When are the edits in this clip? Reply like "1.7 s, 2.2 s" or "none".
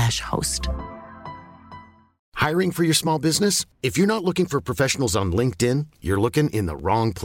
none